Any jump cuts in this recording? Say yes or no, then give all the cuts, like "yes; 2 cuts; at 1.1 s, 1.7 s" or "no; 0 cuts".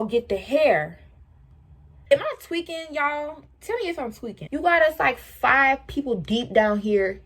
yes; 2 cuts; at 2.1 s, 4.5 s